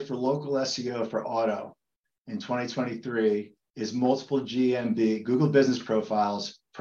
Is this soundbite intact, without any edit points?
yes; 0 cuts

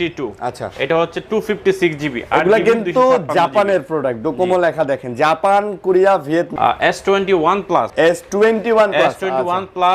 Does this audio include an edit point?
yes; 2 cuts; at 6.5 s, 7.9 s

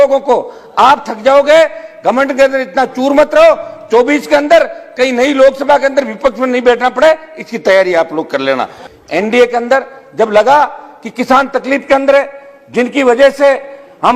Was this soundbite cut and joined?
yes; 1 cut; at 8.8 s

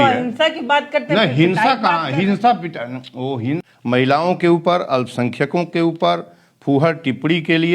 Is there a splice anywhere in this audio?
yes; 1 cut; at 3.6 s

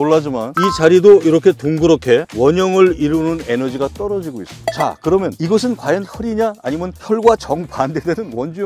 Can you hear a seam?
no; 0 cuts

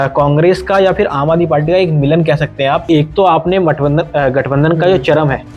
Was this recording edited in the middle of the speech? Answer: yes; 1 cut; at 2.9 s

